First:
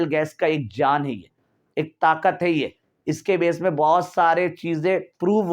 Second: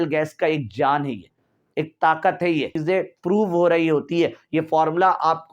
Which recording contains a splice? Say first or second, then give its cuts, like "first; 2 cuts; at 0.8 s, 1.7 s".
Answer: second; 1 cut; at 2.7 s